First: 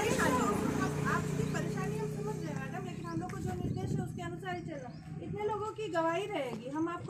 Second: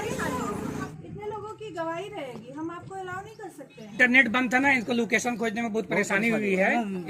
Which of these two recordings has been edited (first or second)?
second